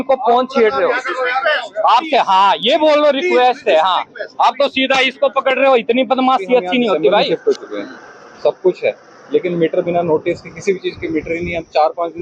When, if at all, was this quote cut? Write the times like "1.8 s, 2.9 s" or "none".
7.3 s